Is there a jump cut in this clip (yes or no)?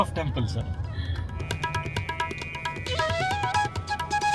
no